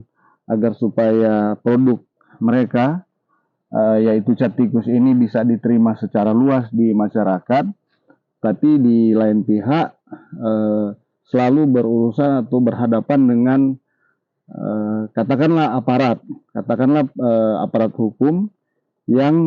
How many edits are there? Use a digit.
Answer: 0